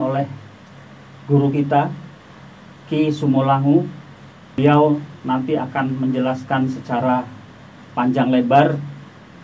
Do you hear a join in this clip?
yes; 1 cut; at 4.6 s

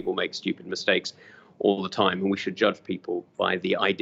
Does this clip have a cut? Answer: no; 0 cuts

